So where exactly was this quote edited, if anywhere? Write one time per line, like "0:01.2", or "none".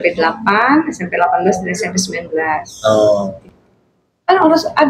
0:03.4